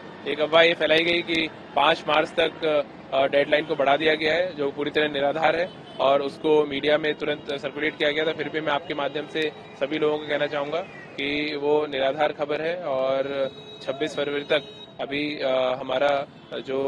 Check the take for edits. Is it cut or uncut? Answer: uncut